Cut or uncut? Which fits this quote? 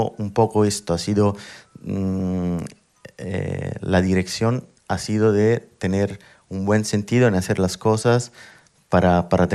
uncut